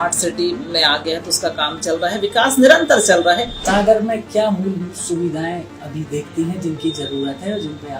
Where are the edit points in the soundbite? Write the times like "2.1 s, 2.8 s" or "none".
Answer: 3.5 s

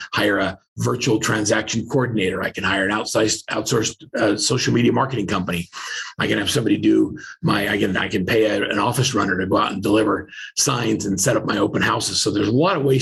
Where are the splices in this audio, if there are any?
none

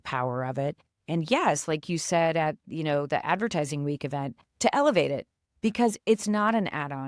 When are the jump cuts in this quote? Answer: 2.6 s

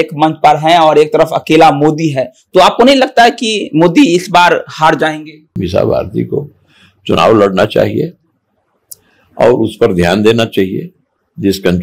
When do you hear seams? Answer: 5.5 s

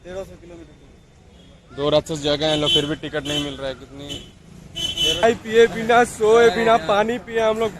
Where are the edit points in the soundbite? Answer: 5.2 s

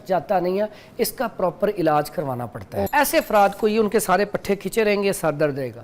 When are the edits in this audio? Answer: 2.9 s

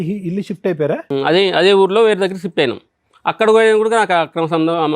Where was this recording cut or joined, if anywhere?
1.0 s

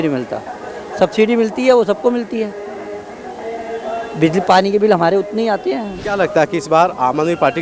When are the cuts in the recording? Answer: 5.9 s

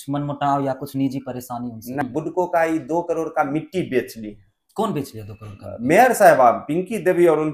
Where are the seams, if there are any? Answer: 2.0 s

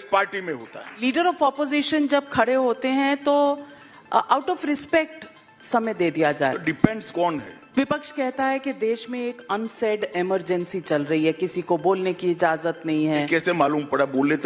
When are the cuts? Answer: 0.9 s, 7.6 s

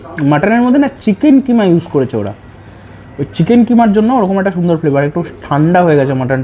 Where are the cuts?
none

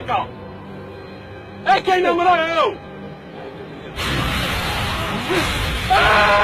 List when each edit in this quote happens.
3.4 s

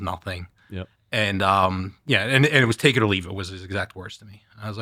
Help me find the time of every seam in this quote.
none

